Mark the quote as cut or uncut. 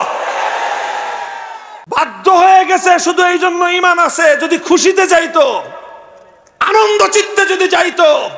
cut